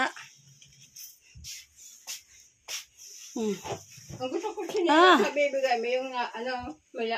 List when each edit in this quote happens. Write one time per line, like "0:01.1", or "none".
none